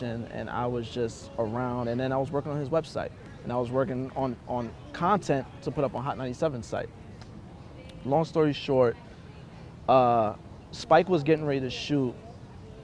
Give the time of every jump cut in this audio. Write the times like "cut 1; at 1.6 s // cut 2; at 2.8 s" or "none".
cut 1; at 5.5 s